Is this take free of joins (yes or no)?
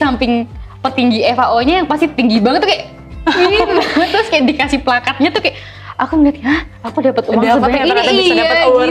yes